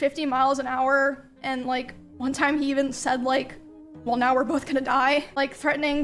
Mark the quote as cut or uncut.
uncut